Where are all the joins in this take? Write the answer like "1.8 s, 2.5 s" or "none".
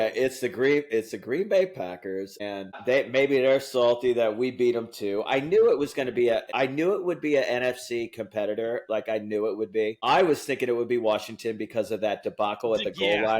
2.8 s, 6.4 s, 10.0 s